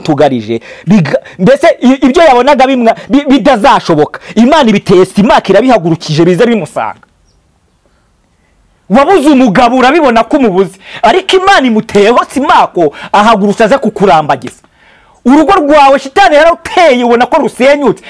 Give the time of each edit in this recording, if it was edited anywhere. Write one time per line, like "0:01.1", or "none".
none